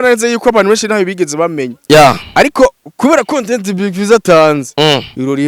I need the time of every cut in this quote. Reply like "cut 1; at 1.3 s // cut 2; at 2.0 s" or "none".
none